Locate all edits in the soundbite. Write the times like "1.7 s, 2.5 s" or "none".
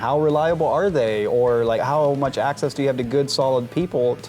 1.8 s